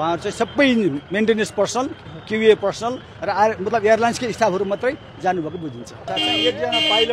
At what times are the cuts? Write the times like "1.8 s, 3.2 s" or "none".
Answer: 6.0 s